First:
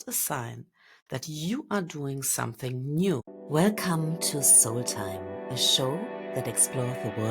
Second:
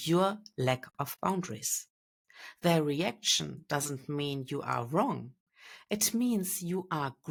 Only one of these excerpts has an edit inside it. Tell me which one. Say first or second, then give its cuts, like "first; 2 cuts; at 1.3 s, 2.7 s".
first; 1 cut; at 3.3 s